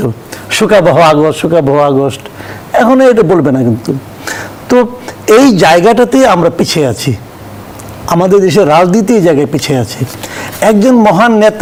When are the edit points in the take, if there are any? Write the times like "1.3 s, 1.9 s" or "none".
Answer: none